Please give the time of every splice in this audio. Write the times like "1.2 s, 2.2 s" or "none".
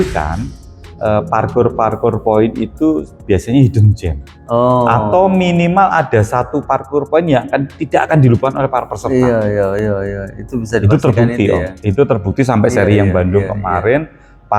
none